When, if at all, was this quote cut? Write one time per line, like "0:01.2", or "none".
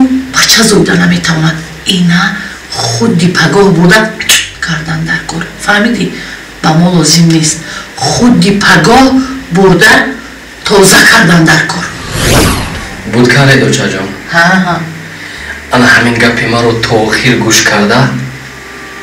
none